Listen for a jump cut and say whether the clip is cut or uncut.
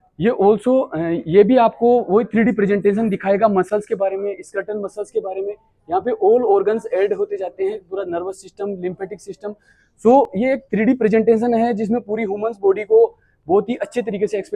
uncut